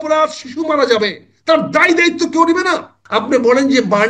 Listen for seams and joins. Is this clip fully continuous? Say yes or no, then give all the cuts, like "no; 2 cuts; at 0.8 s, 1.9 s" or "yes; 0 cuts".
no; 1 cut; at 2.9 s